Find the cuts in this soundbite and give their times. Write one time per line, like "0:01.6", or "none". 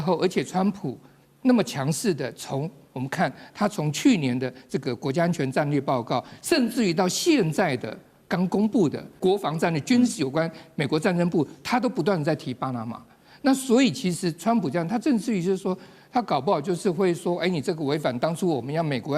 0:09.1

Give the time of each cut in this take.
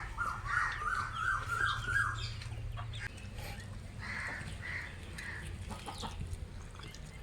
0:03.1

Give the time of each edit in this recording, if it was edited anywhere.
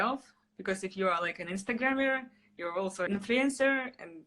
0:03.0

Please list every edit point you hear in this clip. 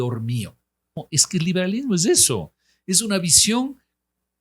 0:01.0

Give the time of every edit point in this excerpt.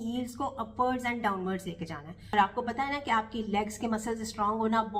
0:02.3

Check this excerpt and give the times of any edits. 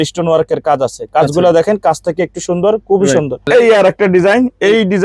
0:03.5

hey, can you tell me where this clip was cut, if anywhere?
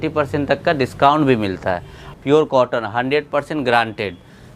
0:02.0

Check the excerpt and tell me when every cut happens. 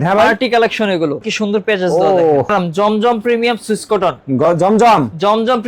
0:01.3
0:02.5

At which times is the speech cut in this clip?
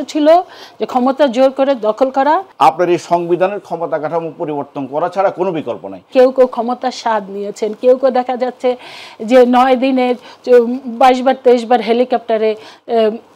0:02.5
0:06.0

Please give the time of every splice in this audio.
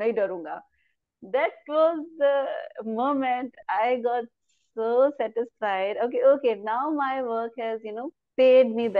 none

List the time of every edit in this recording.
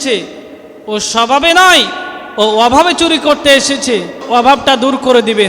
0:04.3

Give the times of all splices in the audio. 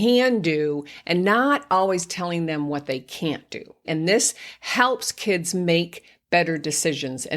0:03.8

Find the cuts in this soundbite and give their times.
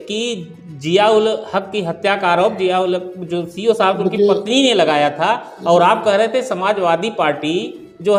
none

